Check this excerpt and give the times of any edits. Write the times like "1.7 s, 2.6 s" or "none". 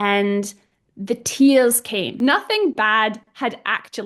2.1 s